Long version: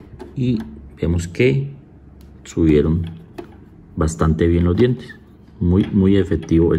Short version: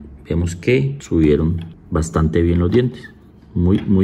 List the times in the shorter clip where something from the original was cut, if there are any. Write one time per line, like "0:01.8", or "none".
0:01.0
0:01.7